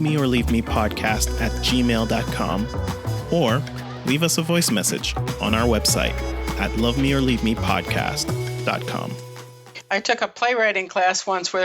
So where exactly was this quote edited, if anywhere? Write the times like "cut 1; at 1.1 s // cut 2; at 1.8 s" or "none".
cut 1; at 9.8 s